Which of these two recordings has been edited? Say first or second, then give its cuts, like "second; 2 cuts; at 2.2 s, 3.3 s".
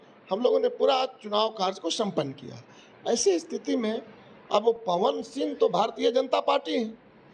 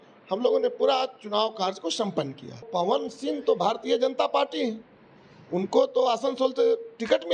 second; 1 cut; at 2.7 s